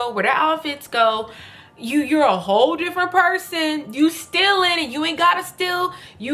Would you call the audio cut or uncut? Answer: uncut